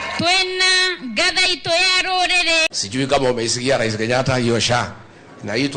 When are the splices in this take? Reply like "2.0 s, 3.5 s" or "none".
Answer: 2.7 s